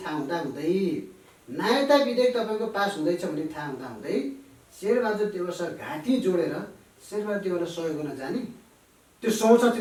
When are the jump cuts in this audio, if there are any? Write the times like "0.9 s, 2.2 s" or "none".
none